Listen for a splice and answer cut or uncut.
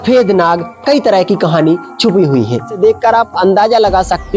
cut